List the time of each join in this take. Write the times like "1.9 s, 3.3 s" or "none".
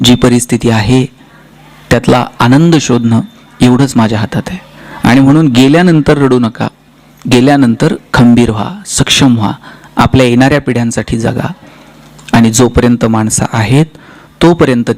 none